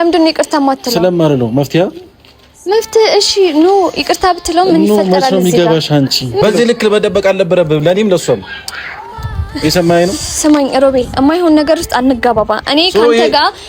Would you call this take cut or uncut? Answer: cut